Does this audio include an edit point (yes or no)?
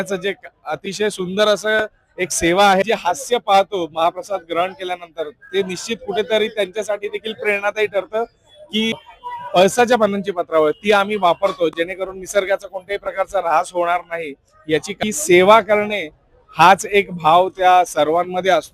yes